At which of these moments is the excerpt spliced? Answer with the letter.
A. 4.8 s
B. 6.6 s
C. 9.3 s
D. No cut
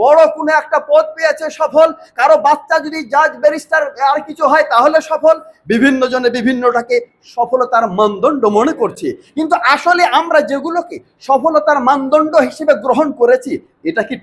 D